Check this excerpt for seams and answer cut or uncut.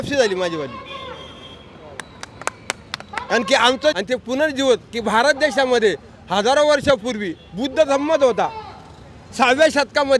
cut